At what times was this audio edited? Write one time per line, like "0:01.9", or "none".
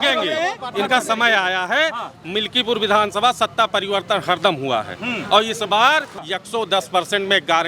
0:06.2